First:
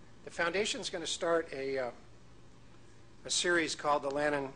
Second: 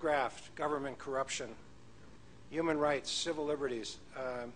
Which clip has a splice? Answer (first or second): first